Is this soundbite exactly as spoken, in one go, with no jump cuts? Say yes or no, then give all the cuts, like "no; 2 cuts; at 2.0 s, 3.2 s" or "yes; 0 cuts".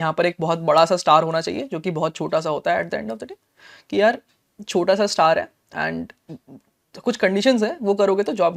yes; 0 cuts